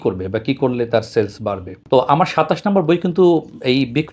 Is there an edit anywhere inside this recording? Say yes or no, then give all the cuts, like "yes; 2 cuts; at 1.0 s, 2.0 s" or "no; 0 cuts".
yes; 1 cut; at 1.8 s